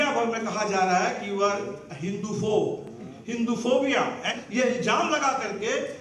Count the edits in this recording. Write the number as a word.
one